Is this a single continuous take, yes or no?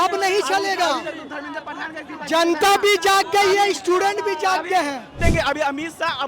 no